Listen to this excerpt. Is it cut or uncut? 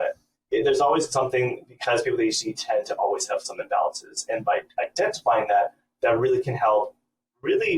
uncut